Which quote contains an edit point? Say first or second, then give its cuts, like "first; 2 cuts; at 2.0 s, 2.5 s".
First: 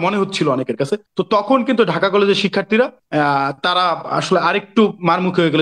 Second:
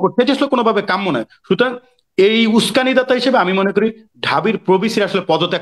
first; 2 cuts; at 1.1 s, 3.0 s